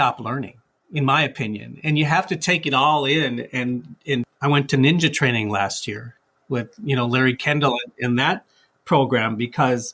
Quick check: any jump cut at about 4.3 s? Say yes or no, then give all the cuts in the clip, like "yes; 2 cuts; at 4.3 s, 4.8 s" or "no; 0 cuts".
yes; 1 cut; at 4.3 s